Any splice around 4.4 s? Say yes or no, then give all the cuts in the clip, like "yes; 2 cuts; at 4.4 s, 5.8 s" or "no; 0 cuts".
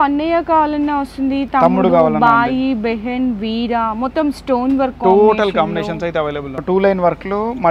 no; 1 cut; at 6.5 s